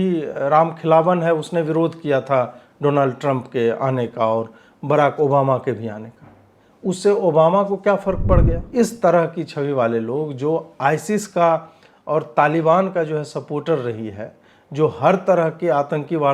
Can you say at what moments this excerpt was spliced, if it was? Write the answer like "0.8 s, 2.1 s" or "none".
8.6 s